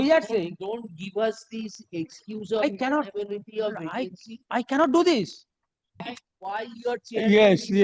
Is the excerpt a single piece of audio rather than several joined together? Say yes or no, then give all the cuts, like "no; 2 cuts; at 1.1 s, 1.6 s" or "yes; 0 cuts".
no; 1 cut; at 6.1 s